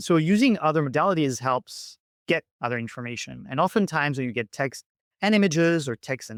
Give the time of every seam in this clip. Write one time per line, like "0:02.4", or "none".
none